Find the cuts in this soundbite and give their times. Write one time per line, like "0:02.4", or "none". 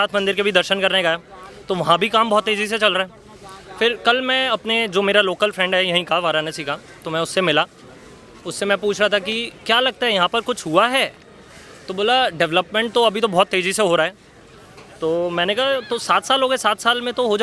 none